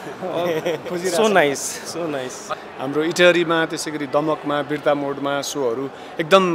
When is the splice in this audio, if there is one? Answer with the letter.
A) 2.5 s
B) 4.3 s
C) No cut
A